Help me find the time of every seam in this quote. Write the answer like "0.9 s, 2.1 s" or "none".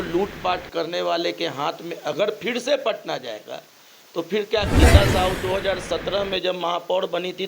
4.7 s